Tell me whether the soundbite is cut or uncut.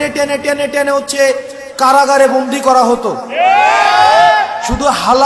uncut